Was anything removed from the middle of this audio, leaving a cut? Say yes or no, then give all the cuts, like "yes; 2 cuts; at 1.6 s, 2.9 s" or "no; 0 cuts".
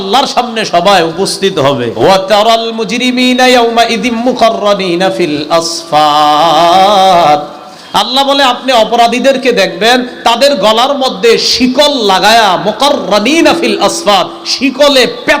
yes; 1 cut; at 1.9 s